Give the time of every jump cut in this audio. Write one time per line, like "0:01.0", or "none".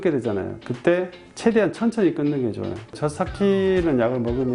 0:02.9